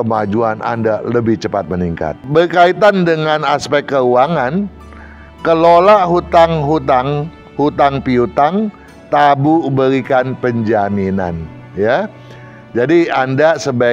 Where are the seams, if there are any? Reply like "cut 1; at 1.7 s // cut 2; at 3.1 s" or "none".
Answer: cut 1; at 2.2 s